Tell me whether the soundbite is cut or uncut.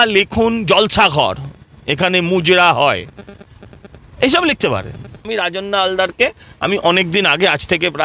cut